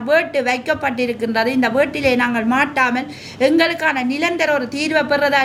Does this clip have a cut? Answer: no; 0 cuts

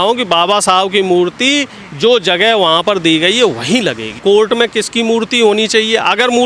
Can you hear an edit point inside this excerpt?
yes; 1 cut; at 4.1 s

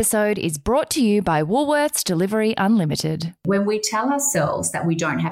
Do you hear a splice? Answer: yes; 1 cut; at 3.5 s

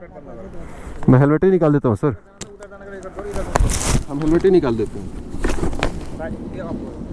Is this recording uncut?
yes; 0 cuts

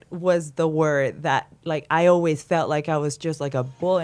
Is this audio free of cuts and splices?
yes; 0 cuts

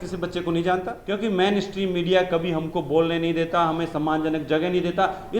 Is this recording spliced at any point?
yes; 1 cut; at 1.0 s

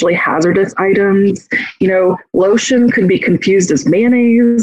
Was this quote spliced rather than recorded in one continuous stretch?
no; 0 cuts

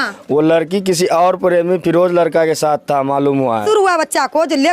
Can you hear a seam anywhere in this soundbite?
yes; 1 cut; at 3.6 s

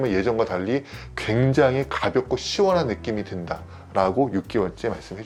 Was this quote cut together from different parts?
no; 0 cuts

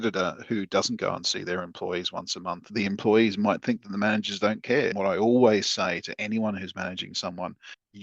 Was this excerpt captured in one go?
no; 1 cut; at 2.6 s

